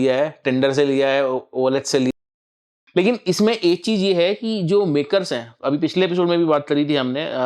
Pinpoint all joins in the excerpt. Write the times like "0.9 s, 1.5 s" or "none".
2.2 s

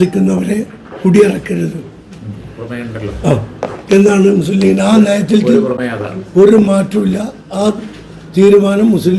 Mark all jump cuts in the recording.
none

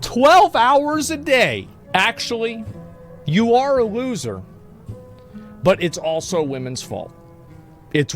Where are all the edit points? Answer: 1.8 s

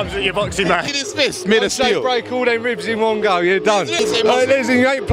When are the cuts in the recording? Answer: 1.0 s, 3.9 s

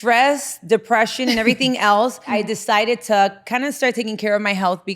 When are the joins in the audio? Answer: 2.4 s

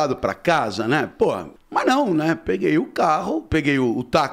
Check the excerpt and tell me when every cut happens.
1.5 s

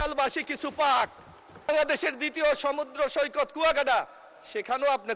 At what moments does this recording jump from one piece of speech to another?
1.7 s

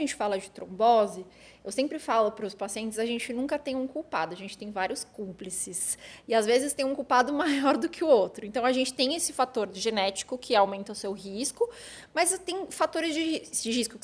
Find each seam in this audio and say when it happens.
none

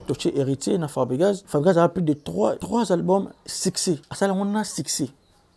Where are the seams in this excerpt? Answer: 1.4 s, 2.6 s, 4.1 s

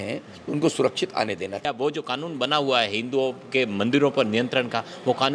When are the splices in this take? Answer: 1.7 s

